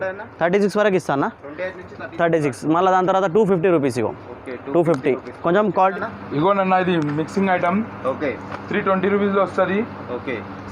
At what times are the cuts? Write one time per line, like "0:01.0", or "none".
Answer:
0:05.9